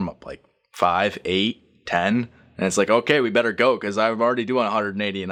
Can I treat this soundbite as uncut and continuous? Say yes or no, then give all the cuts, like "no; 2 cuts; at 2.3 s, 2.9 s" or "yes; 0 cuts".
yes; 0 cuts